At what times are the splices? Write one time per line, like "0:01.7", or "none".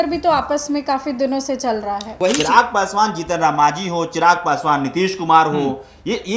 0:02.1

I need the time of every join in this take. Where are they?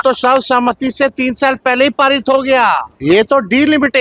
0:02.9

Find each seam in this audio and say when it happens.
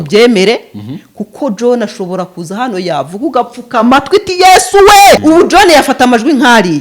0:05.2

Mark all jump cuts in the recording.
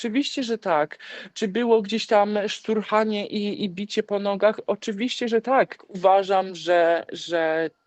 0:05.9

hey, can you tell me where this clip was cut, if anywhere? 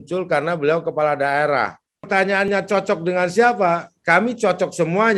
0:02.4

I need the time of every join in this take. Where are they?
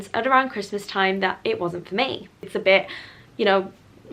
0:02.5

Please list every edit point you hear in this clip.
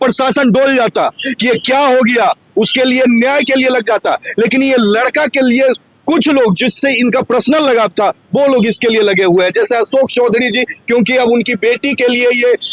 none

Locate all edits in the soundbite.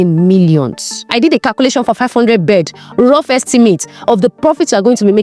0:01.1

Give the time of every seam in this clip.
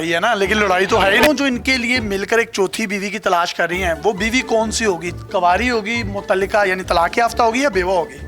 0:01.2

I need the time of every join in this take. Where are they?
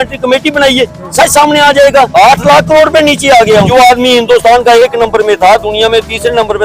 0:02.1
0:03.7

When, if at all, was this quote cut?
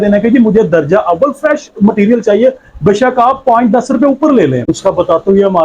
0:04.7

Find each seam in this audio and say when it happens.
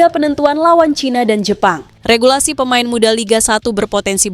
0:01.9

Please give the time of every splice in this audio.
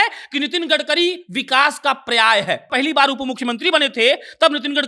0:02.7

